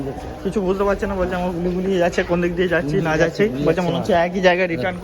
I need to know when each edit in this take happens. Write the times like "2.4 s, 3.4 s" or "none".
2.7 s